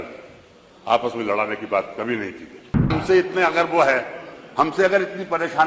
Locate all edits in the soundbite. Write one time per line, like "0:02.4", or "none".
0:02.9